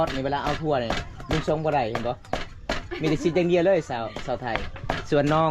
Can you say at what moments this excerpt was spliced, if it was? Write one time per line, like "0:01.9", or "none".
none